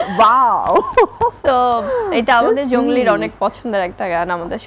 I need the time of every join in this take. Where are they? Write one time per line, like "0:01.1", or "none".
none